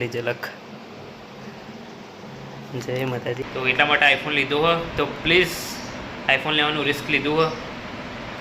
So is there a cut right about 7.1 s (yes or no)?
no